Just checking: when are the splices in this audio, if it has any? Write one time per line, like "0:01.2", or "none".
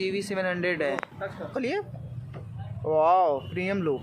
0:01.5